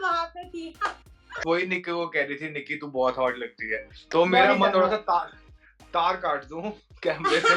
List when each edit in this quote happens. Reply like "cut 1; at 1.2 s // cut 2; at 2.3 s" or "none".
cut 1; at 1.4 s // cut 2; at 3.9 s